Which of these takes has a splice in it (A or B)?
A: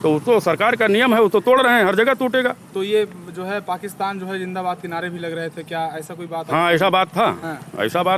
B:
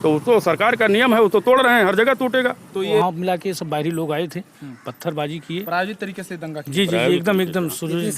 B